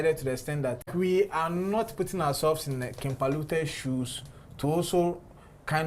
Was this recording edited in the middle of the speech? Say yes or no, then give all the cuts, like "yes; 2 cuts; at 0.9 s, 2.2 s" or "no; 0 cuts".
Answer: yes; 1 cut; at 0.9 s